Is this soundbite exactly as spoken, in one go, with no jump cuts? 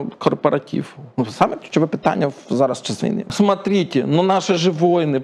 no; 1 cut; at 3.3 s

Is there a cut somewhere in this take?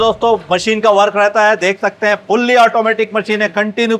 no; 0 cuts

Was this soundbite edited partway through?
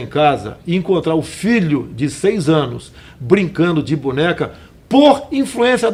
no; 0 cuts

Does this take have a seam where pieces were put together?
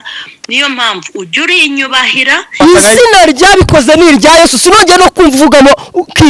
yes; 1 cut; at 2.6 s

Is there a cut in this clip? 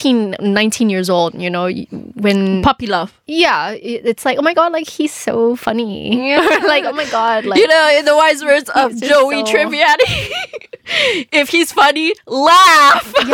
no; 0 cuts

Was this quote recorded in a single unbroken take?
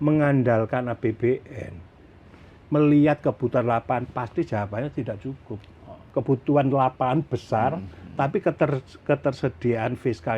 no; 1 cut; at 6.1 s

